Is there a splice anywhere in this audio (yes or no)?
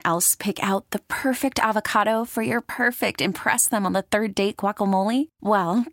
no